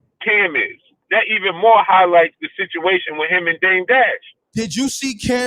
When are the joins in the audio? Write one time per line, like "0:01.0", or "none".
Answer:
0:01.0
0:04.4